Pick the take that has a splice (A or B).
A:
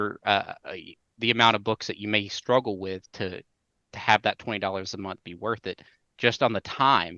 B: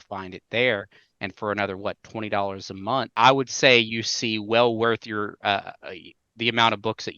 B